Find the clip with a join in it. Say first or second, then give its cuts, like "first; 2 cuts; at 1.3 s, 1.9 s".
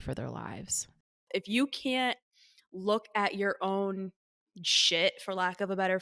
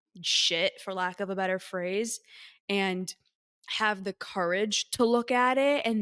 first; 1 cut; at 1.1 s